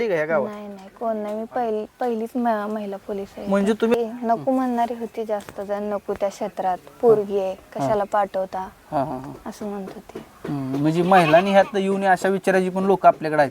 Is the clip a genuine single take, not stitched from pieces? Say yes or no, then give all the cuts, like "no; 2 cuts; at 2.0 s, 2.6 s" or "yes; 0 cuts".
no; 1 cut; at 3.9 s